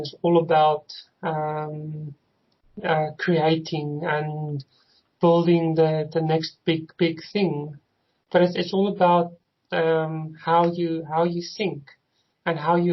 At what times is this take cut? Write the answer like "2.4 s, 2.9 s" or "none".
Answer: none